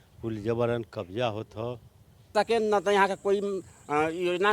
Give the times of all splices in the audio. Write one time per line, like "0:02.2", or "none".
0:02.3